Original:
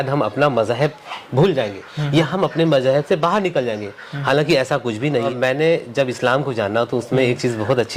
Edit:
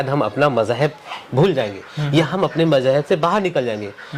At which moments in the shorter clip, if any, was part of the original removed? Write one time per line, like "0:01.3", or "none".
none